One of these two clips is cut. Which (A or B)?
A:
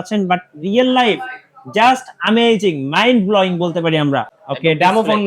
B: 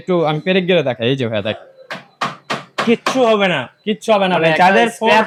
A